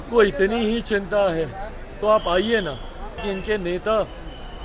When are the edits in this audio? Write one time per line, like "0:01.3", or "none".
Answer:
0:03.2